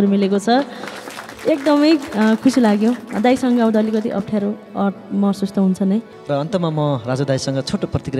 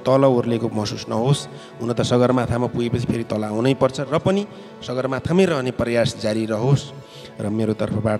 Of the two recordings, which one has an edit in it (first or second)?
first